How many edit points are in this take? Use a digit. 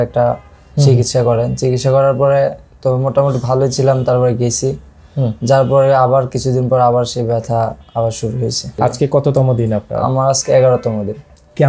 1